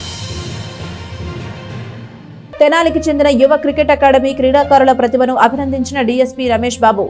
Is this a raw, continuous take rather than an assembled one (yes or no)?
no